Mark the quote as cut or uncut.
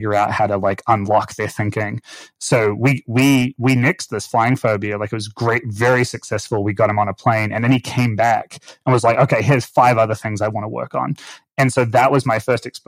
uncut